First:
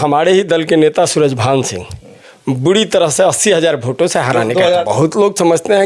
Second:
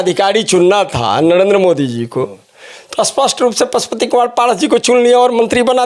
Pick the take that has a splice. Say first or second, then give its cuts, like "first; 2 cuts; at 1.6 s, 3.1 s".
first; 1 cut; at 4.8 s